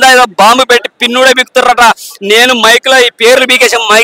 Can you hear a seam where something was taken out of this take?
no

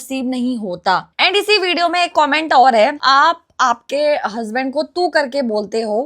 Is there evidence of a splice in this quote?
yes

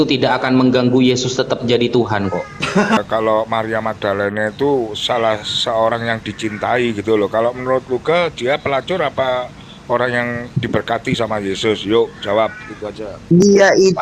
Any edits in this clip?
yes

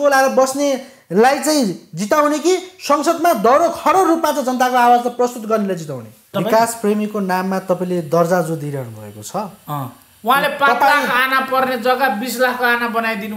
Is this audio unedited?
no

